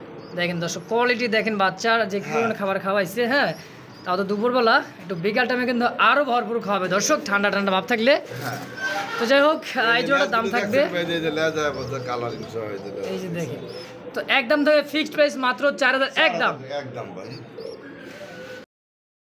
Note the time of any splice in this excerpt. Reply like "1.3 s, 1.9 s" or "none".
none